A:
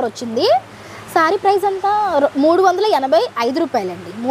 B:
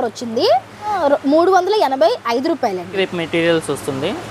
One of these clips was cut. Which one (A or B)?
B